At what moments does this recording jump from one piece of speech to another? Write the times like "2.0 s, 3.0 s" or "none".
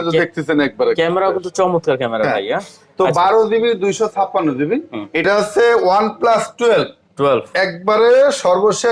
5.2 s